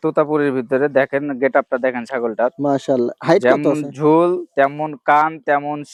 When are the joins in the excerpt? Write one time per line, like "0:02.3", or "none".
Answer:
none

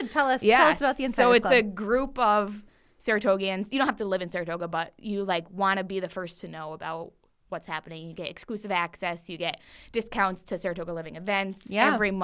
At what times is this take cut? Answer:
none

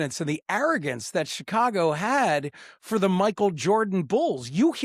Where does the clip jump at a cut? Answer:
none

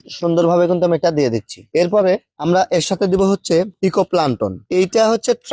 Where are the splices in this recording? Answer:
none

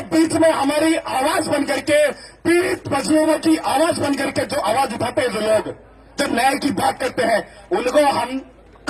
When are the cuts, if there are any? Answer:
none

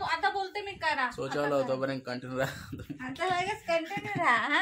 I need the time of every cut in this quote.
0:03.1

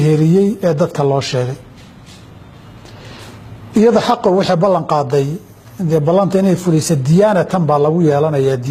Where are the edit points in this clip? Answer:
none

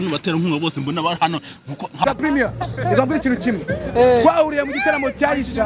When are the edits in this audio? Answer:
0:02.0

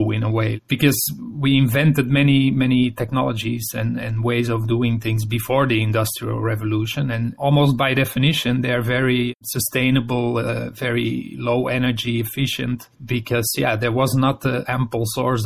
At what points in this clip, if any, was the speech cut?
none

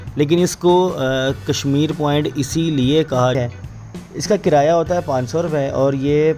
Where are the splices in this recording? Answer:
0:03.4

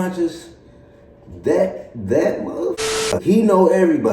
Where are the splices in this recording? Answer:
none

